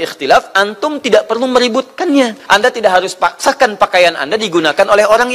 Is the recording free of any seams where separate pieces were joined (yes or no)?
no